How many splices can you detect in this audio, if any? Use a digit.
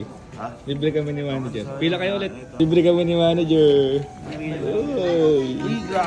1